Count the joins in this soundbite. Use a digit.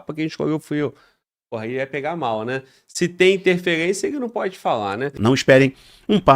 1